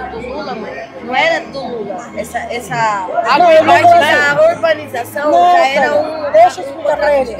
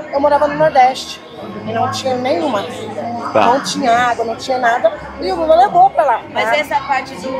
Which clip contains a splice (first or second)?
second